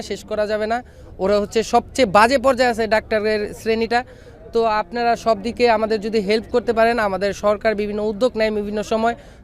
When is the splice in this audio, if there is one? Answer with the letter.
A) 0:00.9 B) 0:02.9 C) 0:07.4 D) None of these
D